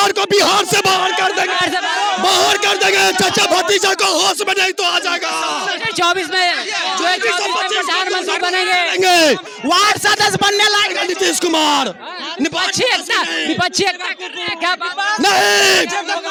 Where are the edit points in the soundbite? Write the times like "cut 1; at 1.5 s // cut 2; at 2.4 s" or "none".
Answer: none